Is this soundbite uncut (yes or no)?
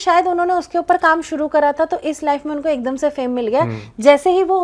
yes